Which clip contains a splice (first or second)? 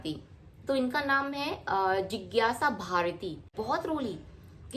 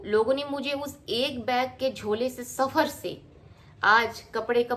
first